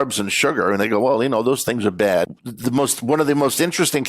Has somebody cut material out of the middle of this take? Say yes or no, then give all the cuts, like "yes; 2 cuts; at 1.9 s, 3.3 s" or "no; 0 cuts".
yes; 1 cut; at 2.3 s